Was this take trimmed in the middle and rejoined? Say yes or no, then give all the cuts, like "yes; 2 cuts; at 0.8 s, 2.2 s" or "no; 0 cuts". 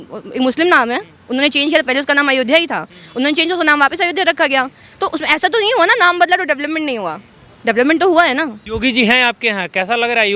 yes; 1 cut; at 8.6 s